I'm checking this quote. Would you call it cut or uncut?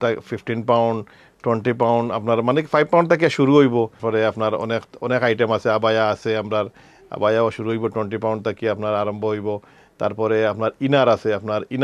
uncut